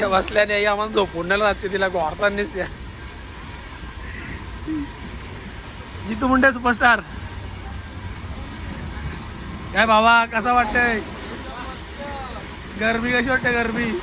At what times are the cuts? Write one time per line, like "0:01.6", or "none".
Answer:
none